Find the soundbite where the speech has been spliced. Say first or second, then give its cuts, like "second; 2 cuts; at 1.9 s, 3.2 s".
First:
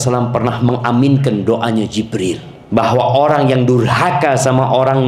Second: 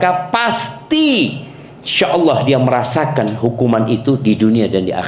first; 1 cut; at 2.5 s